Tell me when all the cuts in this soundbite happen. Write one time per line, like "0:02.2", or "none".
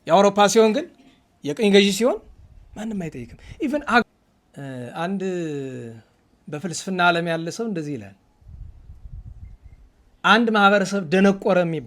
0:04.0